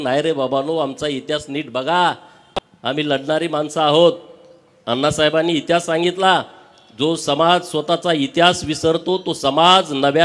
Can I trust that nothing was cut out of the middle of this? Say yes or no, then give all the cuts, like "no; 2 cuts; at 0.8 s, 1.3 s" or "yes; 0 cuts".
yes; 0 cuts